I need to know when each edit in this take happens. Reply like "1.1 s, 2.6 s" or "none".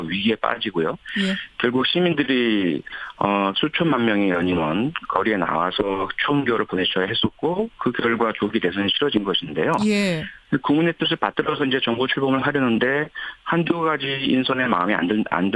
none